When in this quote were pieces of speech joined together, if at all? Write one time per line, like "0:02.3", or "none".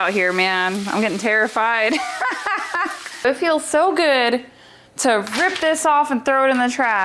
0:03.2